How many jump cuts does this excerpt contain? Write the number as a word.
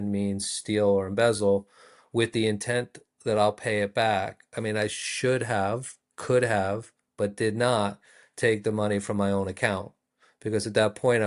zero